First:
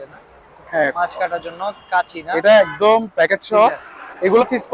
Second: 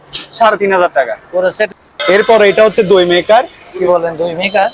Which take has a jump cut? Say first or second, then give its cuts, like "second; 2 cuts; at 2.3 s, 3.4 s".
second; 1 cut; at 1.7 s